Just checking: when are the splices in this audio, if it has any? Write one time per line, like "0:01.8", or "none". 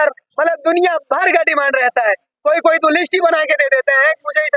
none